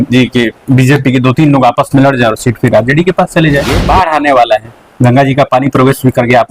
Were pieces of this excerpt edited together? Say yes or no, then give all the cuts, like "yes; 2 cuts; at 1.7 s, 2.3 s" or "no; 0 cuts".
yes; 1 cut; at 3.8 s